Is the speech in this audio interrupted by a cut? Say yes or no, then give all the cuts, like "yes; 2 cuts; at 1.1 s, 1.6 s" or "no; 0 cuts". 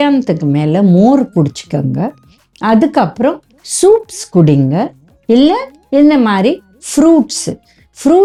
no; 0 cuts